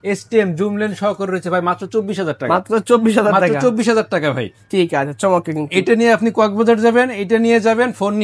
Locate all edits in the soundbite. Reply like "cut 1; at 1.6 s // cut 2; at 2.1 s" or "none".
none